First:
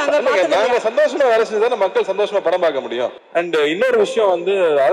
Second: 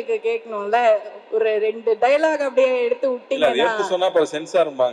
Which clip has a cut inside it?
first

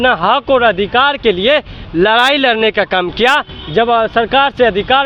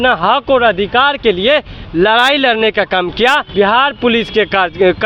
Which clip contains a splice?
second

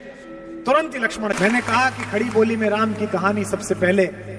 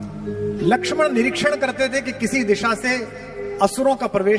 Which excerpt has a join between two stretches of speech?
first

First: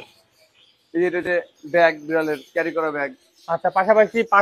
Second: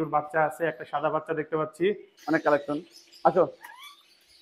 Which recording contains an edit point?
second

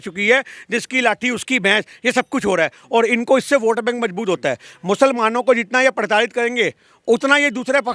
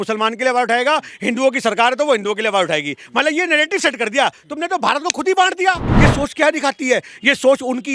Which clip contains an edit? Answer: second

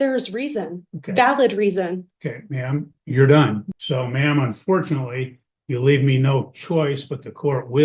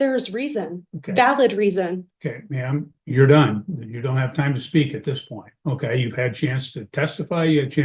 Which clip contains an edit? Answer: first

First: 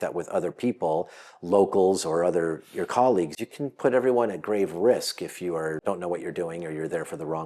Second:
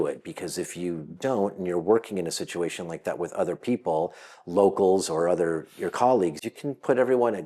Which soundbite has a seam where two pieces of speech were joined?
first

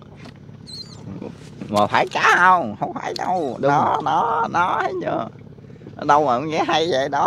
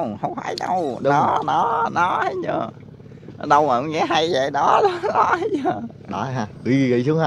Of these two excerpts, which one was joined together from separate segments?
second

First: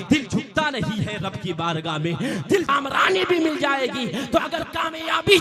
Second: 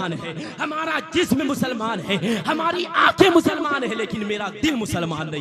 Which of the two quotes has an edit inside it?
first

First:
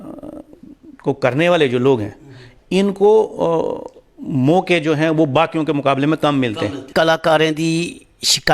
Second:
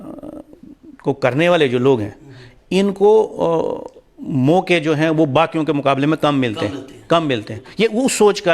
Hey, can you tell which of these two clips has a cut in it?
first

